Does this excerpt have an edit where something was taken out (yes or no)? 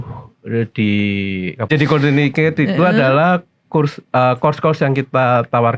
yes